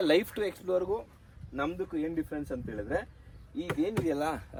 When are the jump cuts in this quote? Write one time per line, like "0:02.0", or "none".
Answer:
none